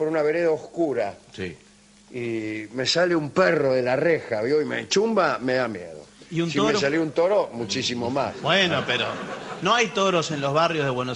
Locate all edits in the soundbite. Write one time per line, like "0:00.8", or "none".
0:10.3